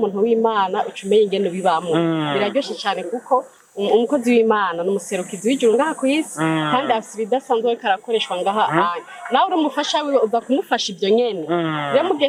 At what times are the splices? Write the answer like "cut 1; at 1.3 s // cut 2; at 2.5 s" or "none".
none